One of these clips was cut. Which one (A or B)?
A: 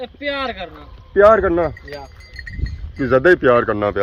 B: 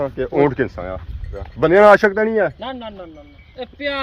B